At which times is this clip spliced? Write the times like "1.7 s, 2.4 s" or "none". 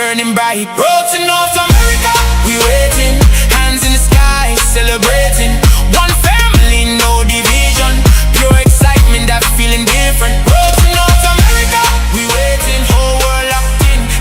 none